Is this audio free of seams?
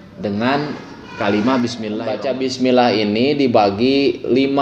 no; 1 cut; at 2.2 s

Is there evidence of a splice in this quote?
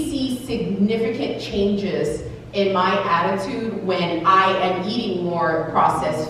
no; 0 cuts

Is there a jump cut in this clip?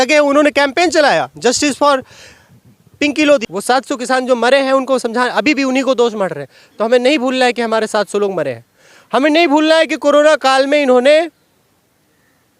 yes; 1 cut; at 3.5 s

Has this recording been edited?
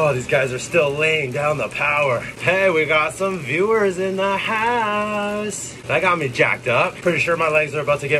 yes; 3 cuts; at 2.3 s, 5.7 s, 7.0 s

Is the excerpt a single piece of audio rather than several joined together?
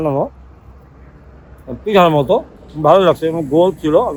yes; 0 cuts

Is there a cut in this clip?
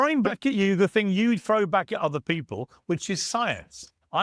no; 0 cuts

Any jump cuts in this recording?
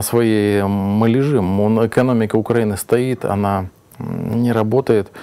no; 0 cuts

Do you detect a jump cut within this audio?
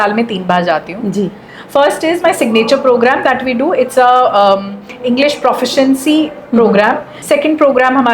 yes; 1 cut; at 7.1 s

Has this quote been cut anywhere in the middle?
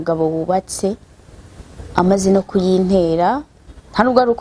no; 0 cuts

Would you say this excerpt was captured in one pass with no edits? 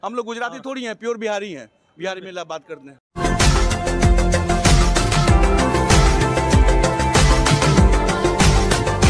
yes; 0 cuts

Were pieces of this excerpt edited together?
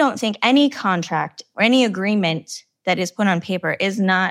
yes; 1 cut; at 1.4 s

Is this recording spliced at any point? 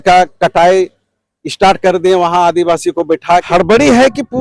yes; 1 cut; at 3.4 s

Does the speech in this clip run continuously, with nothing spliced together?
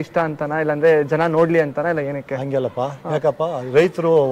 yes; 0 cuts

